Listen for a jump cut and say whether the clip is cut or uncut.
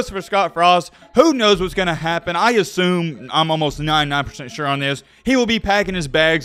uncut